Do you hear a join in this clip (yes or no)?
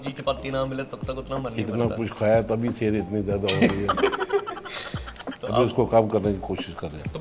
no